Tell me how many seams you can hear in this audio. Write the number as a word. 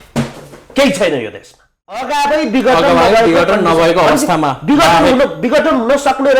one